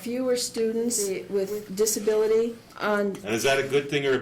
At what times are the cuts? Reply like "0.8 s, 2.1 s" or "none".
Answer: 1.1 s, 2.7 s